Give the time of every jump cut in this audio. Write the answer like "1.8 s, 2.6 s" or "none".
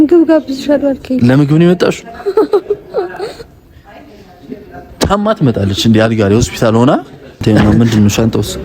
7.4 s